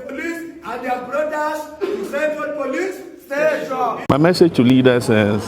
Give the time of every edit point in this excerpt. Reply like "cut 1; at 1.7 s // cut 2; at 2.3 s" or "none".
cut 1; at 4.0 s